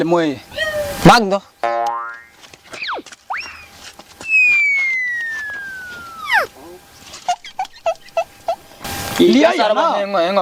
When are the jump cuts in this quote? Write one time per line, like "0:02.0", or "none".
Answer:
none